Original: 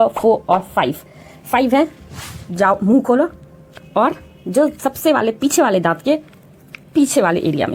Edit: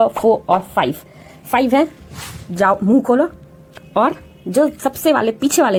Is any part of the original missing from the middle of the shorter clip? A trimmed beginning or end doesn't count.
no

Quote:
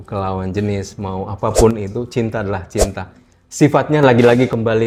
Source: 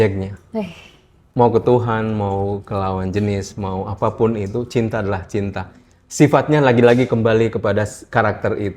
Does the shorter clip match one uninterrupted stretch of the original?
yes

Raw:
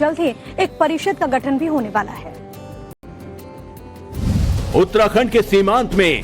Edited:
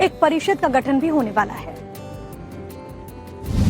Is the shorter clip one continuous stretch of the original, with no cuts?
no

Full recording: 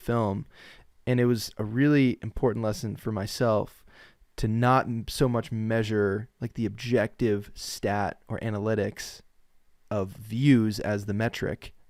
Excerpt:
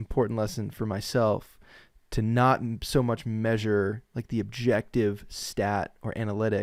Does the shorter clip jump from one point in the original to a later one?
no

